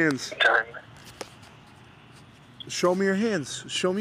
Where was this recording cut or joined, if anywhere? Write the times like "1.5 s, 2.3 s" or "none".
none